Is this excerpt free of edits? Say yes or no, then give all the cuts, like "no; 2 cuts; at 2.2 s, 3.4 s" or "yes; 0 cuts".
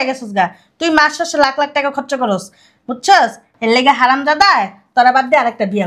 yes; 0 cuts